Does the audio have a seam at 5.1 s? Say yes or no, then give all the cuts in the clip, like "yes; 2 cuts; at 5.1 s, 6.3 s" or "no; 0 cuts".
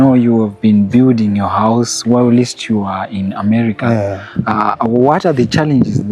no; 0 cuts